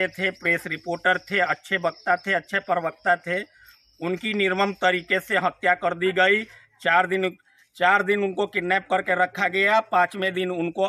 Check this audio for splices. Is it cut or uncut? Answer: uncut